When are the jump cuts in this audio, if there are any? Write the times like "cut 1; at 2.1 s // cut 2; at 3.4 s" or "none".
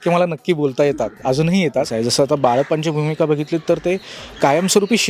cut 1; at 1.9 s